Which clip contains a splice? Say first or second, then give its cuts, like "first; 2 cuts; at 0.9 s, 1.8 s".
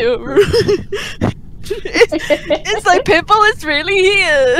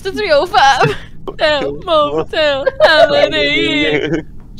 second; 1 cut; at 1.3 s